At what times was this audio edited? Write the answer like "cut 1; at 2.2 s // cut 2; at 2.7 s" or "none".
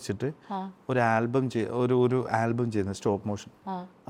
none

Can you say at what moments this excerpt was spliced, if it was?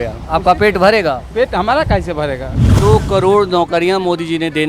cut 1; at 2.6 s

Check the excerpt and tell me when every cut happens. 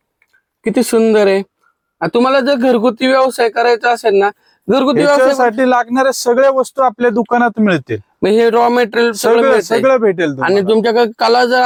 none

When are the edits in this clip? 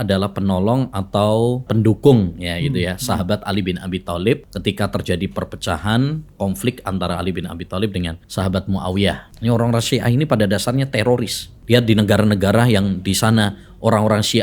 cut 1; at 1.7 s // cut 2; at 4.5 s // cut 3; at 8.2 s // cut 4; at 9.3 s // cut 5; at 11.5 s

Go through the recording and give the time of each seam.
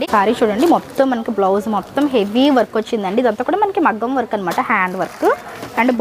none

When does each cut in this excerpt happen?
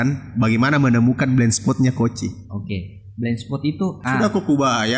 cut 1; at 4.0 s

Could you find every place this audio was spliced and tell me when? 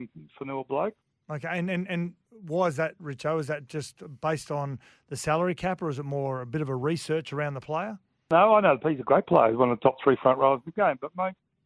cut 1; at 1.1 s // cut 2; at 8.3 s

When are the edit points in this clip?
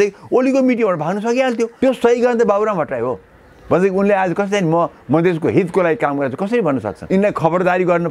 cut 1; at 1.7 s // cut 2; at 7.0 s

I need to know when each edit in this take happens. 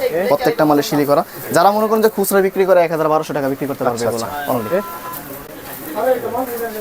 none

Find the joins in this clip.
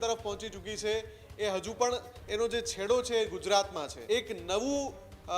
cut 1; at 3.9 s

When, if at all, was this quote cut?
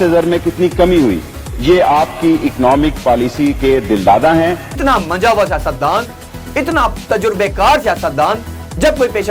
cut 1; at 4.7 s

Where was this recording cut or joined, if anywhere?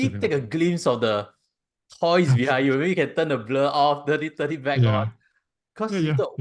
none

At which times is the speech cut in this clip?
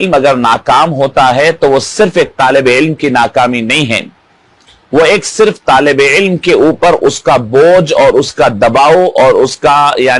none

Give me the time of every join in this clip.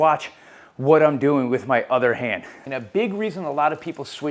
cut 1; at 2.6 s

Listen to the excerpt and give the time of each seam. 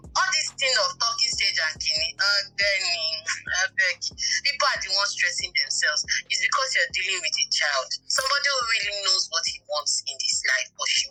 none

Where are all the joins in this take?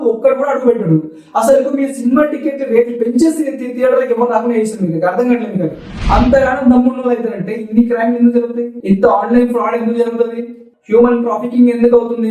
cut 1; at 5.9 s

